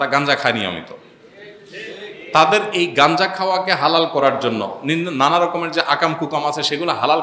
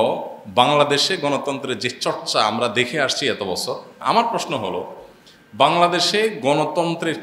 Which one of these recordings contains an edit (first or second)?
second